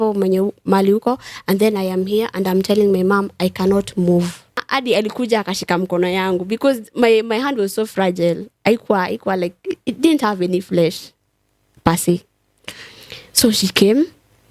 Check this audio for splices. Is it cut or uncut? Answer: cut